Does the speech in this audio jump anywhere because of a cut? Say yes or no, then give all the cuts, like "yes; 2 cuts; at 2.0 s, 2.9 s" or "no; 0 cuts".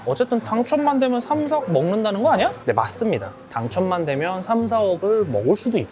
no; 0 cuts